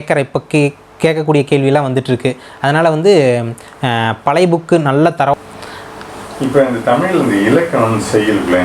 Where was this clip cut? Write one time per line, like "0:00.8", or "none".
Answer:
0:05.3